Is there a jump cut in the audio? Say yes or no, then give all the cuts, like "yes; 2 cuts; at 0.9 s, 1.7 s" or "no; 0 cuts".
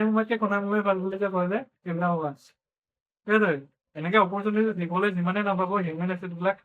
no; 0 cuts